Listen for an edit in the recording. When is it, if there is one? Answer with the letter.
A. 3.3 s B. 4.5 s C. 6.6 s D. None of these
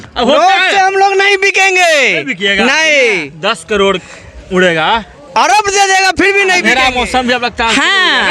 C